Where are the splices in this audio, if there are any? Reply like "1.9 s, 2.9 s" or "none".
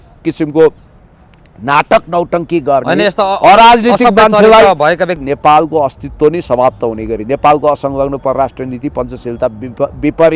5.2 s